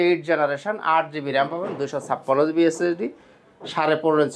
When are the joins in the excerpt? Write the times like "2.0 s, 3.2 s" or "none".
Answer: none